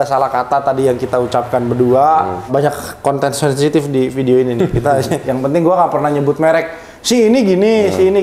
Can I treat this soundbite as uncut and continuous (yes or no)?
no